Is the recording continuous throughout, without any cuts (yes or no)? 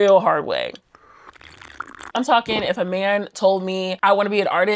yes